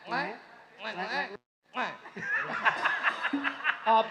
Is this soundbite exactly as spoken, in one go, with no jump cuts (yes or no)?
yes